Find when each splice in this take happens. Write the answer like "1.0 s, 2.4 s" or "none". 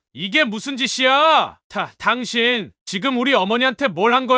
1.6 s